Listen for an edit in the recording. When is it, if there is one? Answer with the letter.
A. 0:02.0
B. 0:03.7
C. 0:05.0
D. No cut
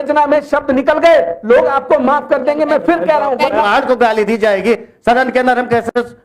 B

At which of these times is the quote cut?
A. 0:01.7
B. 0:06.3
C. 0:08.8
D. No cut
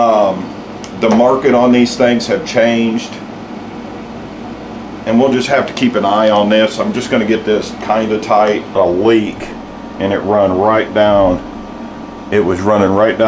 C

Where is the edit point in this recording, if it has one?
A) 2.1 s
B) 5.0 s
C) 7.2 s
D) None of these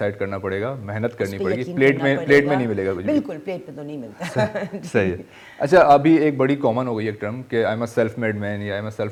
D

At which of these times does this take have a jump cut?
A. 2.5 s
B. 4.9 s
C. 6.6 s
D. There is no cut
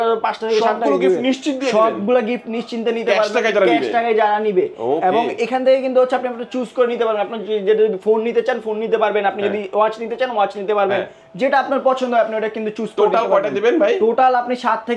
D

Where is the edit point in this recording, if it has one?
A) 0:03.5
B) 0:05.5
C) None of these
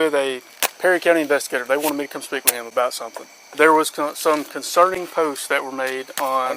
A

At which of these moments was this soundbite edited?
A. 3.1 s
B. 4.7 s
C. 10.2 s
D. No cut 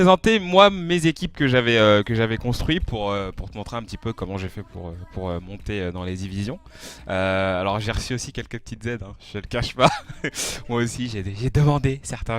A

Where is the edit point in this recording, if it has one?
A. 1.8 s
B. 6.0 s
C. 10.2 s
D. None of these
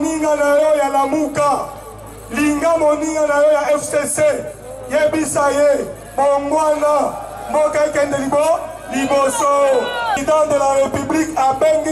C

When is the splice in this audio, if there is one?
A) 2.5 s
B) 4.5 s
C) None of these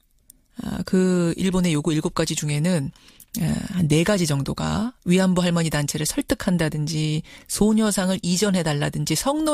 C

